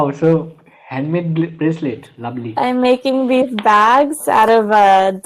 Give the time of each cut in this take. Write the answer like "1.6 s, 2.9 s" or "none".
none